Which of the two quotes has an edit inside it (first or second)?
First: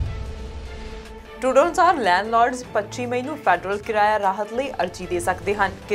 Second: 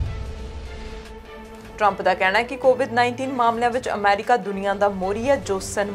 first